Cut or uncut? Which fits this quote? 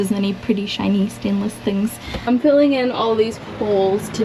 cut